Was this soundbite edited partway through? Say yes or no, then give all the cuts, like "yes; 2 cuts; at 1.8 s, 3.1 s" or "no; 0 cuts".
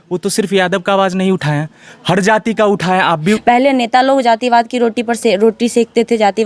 yes; 1 cut; at 3.4 s